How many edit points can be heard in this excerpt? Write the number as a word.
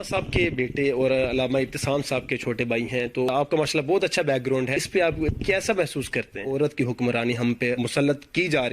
four